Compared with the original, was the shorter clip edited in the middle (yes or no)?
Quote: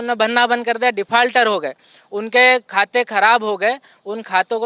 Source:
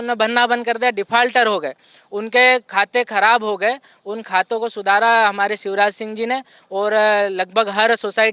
no